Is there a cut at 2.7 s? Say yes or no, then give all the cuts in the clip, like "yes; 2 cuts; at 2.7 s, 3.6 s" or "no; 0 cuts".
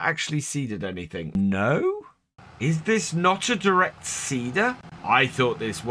no; 2 cuts; at 1.4 s, 4.9 s